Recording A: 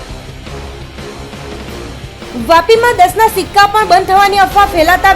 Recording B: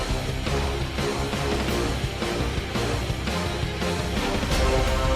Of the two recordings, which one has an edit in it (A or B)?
A